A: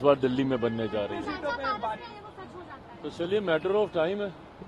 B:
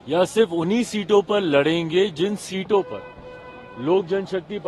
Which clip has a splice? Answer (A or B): A